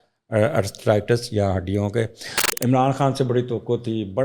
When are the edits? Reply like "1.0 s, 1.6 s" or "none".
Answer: 2.4 s